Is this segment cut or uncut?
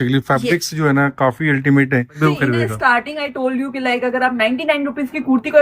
cut